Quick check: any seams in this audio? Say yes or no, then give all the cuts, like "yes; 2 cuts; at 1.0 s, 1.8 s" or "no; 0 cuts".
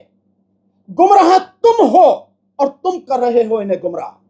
no; 0 cuts